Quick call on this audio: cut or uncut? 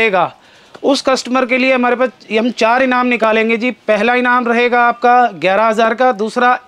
uncut